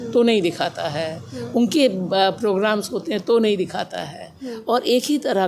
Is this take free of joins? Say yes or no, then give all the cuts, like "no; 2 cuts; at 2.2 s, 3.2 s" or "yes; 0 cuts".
yes; 0 cuts